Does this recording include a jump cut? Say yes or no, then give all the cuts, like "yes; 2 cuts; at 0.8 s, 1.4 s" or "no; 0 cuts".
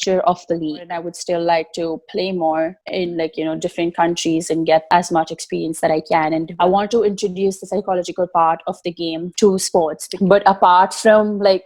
yes; 3 cuts; at 0.9 s, 6.5 s, 10.0 s